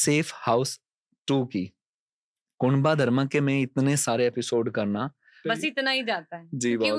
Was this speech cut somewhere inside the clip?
yes; 1 cut; at 5.4 s

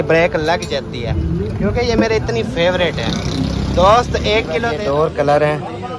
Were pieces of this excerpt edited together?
yes; 1 cut; at 4.7 s

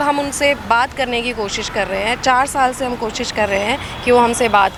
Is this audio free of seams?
yes; 0 cuts

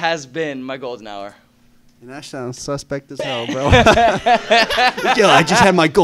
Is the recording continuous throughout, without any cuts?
yes; 0 cuts

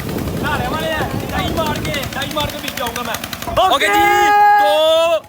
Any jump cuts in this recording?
yes; 1 cut; at 3.5 s

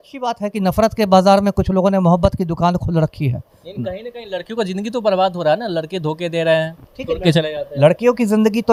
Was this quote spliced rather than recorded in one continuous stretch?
no; 0 cuts

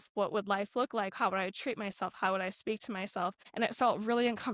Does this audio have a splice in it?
yes; 1 cut; at 3.4 s

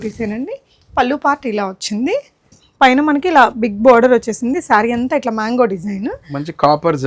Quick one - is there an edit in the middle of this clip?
yes; 1 cut; at 2.6 s

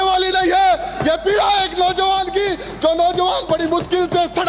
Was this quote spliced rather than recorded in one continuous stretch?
no; 0 cuts

